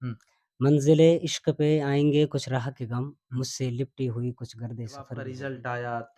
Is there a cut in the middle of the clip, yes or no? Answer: yes